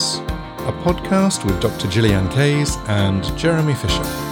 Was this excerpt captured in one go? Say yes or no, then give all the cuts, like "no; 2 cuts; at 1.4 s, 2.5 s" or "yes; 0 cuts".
yes; 0 cuts